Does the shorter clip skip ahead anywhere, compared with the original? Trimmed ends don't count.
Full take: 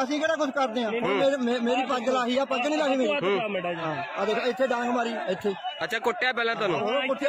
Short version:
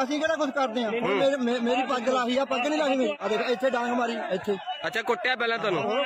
yes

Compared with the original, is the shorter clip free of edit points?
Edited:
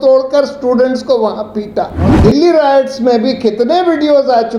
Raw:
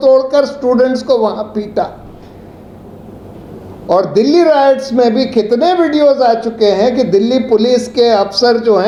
no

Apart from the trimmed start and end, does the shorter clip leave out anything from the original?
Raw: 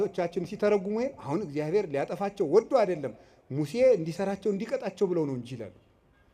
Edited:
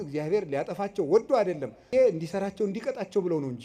yes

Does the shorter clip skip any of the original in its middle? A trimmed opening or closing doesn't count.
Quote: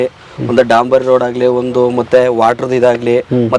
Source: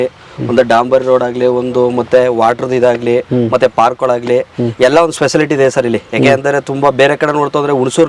no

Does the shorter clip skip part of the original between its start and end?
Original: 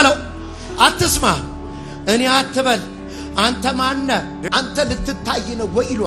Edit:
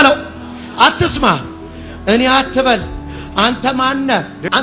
no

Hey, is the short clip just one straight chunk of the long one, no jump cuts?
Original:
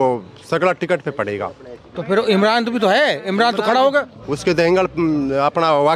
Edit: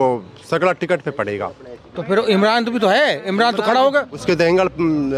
no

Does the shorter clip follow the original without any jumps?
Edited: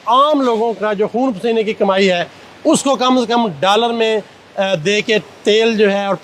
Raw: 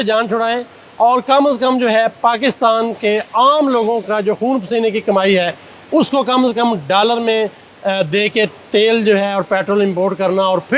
yes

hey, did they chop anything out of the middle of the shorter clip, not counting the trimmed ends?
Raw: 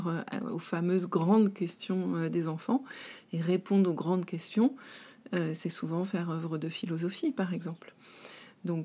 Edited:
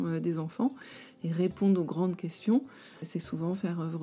yes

